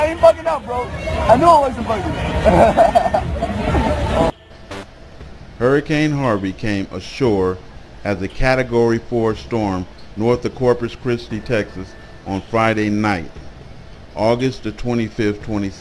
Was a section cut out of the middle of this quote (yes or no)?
no